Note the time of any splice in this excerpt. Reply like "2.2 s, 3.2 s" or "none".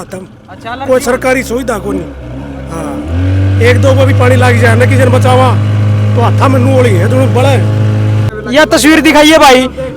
8.4 s